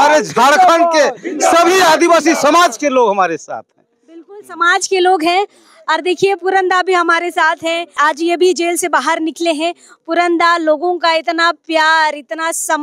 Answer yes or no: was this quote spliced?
no